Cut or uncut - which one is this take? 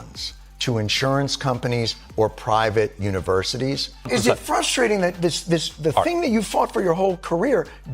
cut